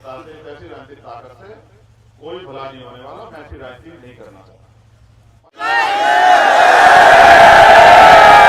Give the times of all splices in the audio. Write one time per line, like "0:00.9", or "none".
0:05.5